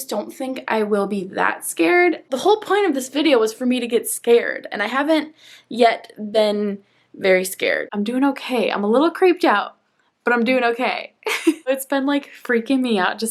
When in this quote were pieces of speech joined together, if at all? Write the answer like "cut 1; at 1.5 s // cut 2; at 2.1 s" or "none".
cut 1; at 2.3 s // cut 2; at 7.9 s // cut 3; at 11.7 s

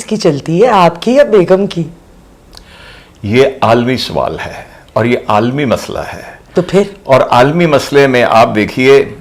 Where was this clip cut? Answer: none

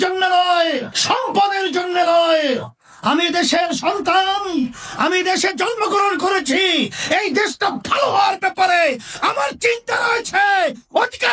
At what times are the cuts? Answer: cut 1; at 0.9 s

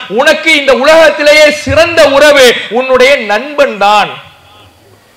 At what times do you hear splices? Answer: none

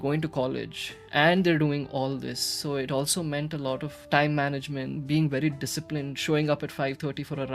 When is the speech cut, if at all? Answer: cut 1; at 3.9 s // cut 2; at 5.0 s

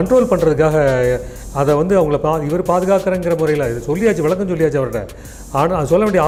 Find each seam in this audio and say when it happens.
none

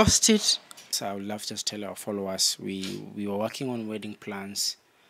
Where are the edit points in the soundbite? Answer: cut 1; at 1.0 s

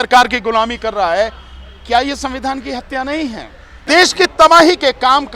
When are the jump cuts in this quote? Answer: cut 1; at 3.7 s

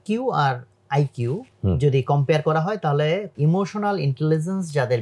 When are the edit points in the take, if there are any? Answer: cut 1; at 1.5 s // cut 2; at 3.3 s

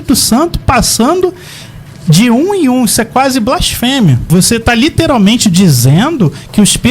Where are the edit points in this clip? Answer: cut 1; at 4.2 s

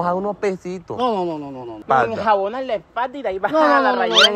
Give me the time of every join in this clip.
cut 1; at 1.8 s

